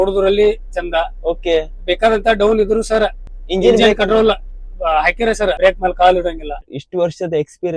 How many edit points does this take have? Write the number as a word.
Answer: three